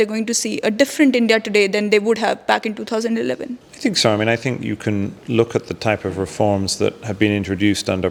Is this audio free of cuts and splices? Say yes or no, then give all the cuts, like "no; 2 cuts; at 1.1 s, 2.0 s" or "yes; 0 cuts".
yes; 0 cuts